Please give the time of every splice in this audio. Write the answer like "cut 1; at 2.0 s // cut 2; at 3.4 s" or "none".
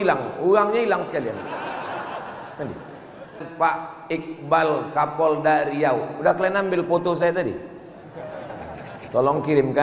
cut 1; at 3.4 s